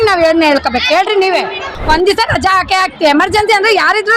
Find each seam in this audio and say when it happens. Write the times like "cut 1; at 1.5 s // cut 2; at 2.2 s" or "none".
cut 1; at 1.6 s